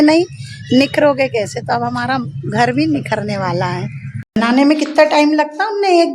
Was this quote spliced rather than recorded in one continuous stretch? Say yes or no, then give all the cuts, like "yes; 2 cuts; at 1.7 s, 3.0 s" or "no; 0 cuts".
yes; 1 cut; at 4.4 s